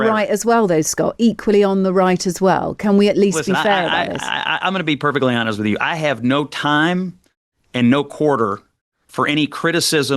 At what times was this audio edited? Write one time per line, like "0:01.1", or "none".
none